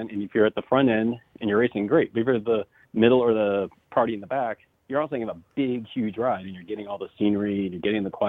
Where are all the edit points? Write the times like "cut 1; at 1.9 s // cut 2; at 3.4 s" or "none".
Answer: cut 1; at 2.8 s // cut 2; at 3.8 s // cut 3; at 4.7 s